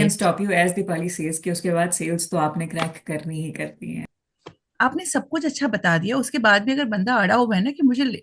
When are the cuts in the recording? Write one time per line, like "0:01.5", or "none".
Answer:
0:04.0